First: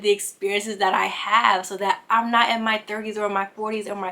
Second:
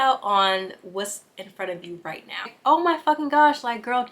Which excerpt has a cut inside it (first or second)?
second